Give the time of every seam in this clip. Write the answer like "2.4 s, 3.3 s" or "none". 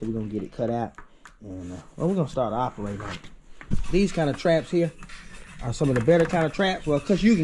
3.7 s